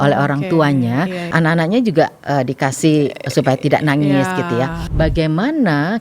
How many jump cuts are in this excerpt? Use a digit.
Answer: 2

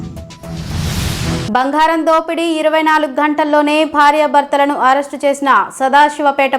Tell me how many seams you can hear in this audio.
1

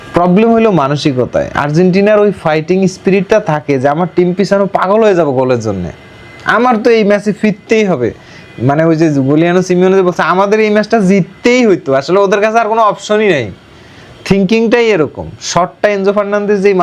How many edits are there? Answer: 0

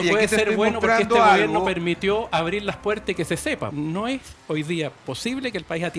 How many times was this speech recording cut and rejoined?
1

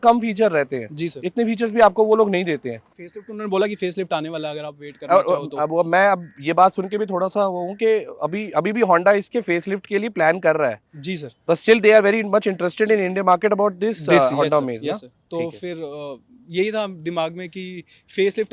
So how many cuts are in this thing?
0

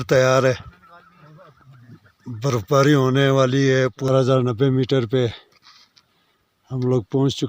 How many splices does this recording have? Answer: 1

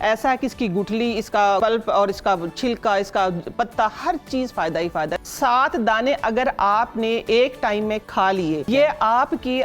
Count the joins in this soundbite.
3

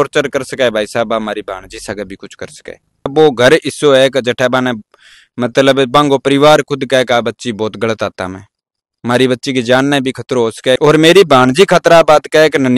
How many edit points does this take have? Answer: 2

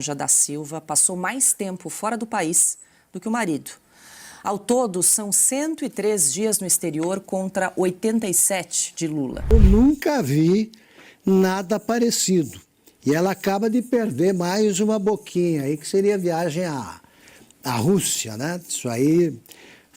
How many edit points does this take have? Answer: 1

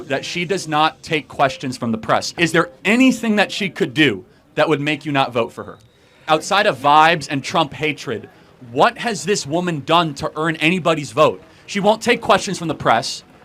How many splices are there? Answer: 2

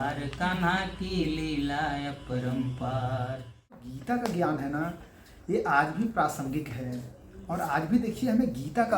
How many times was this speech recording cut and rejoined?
1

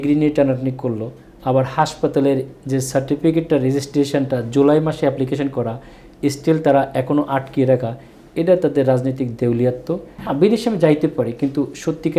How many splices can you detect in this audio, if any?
1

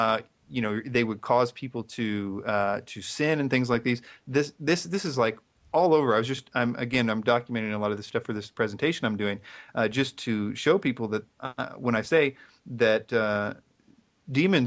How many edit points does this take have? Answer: 1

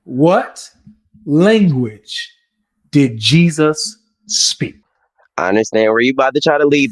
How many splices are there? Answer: 0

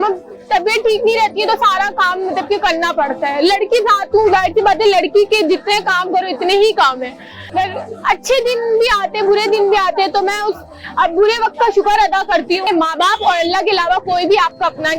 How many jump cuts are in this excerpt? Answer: 2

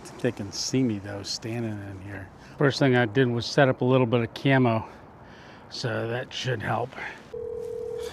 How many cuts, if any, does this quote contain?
2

